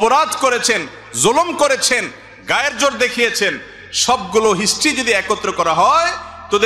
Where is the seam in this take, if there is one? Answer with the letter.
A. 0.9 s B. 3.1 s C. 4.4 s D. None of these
D